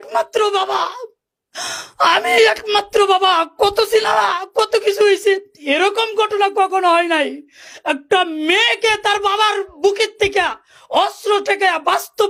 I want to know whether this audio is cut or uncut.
uncut